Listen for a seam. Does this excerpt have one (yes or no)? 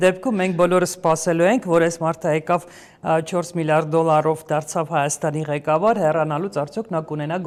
no